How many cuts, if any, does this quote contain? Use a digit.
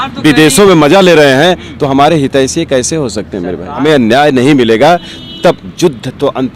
1